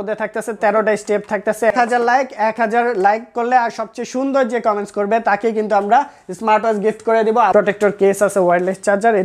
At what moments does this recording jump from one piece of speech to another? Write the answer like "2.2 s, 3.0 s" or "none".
1.7 s, 7.5 s